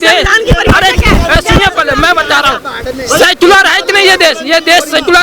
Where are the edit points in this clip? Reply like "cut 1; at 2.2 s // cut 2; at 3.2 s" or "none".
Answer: none